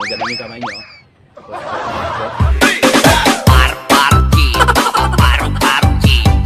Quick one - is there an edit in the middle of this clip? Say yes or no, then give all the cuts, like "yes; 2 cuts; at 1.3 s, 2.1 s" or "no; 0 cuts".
yes; 1 cut; at 2.4 s